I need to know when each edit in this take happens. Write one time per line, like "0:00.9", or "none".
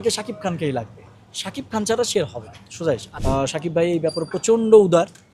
0:03.1